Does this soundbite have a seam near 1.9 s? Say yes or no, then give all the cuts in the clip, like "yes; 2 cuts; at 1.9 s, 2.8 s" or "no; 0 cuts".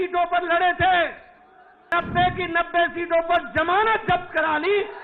yes; 1 cut; at 1.9 s